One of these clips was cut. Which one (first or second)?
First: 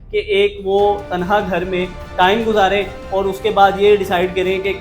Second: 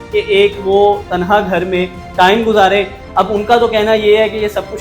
second